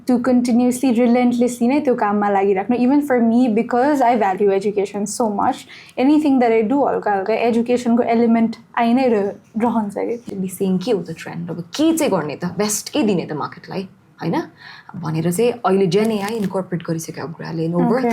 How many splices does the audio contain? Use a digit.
1